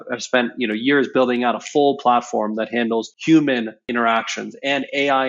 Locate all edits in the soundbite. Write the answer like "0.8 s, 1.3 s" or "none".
3.1 s, 3.8 s